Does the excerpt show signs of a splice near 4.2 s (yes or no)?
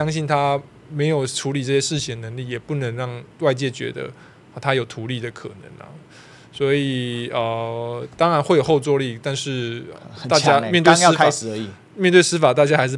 no